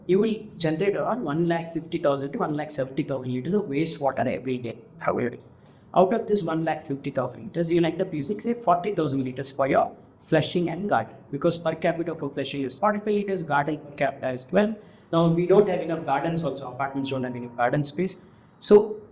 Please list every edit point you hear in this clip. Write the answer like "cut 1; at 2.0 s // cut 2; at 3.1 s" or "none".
none